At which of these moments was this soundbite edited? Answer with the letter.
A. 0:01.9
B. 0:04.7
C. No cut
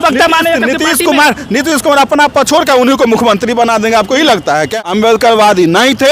B